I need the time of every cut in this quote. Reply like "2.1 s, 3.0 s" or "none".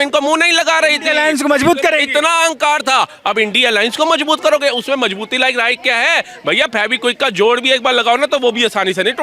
none